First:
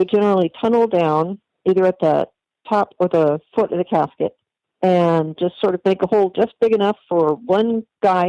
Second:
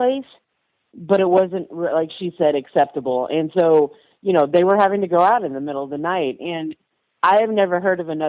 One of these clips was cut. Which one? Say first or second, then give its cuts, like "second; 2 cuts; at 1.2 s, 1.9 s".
first; 1 cut; at 1.4 s